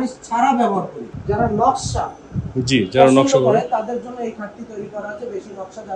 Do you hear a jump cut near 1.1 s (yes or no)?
yes